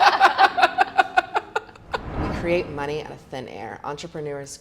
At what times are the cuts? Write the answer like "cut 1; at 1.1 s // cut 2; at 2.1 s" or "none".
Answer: cut 1; at 2.2 s